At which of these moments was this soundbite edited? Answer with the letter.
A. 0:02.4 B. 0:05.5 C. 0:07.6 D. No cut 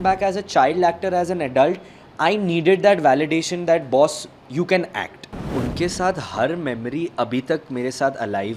B